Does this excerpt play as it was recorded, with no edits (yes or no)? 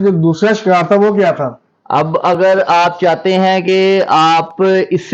yes